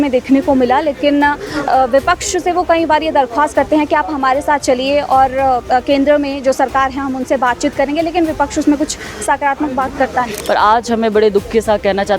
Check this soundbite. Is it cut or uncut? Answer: cut